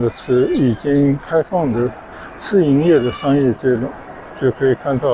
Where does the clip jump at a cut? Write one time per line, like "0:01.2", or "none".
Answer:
none